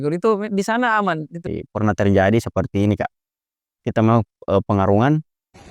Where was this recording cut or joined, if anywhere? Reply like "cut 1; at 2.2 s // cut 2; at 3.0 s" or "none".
cut 1; at 1.3 s